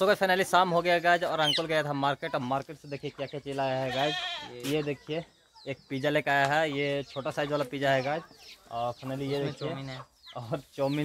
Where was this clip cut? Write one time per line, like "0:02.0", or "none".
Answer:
none